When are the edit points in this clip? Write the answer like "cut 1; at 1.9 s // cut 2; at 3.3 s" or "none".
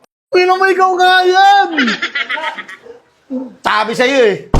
none